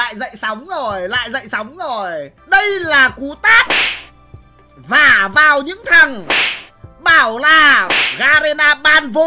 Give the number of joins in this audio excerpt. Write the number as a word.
one